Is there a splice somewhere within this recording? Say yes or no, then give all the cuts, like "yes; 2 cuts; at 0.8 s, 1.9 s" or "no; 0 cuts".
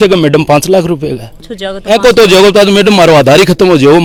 no; 0 cuts